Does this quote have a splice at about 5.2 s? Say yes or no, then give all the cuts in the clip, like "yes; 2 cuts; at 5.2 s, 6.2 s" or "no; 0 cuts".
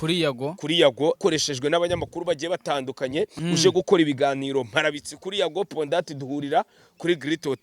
no; 2 cuts; at 1.2 s, 3.3 s